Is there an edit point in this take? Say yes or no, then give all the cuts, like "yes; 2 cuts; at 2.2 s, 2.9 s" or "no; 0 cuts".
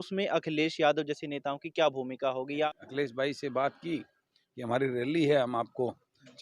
yes; 1 cut; at 2.7 s